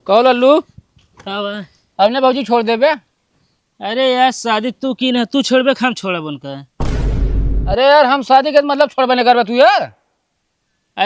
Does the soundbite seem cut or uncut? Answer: uncut